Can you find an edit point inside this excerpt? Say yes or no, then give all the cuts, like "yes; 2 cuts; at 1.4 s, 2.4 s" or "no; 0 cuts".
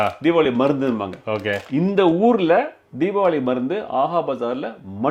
no; 0 cuts